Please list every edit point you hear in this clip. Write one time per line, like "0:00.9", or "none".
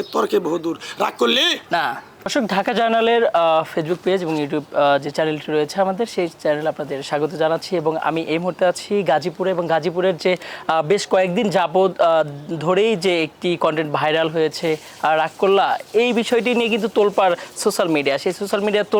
none